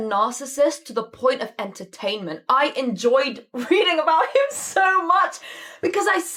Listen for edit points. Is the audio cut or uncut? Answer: uncut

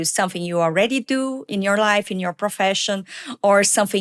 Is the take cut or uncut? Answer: cut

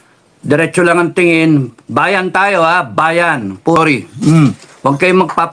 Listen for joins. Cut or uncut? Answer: cut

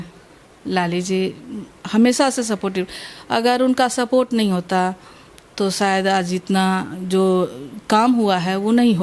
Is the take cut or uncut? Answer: uncut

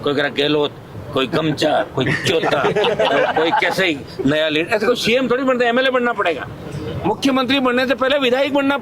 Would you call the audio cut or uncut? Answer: uncut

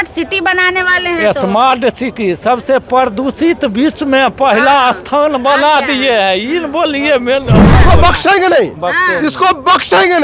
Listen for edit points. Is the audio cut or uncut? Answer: cut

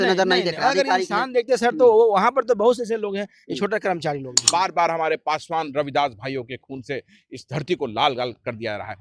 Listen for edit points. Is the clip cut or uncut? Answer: cut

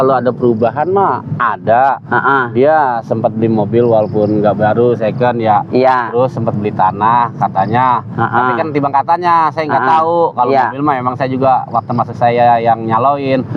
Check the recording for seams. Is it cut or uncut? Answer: uncut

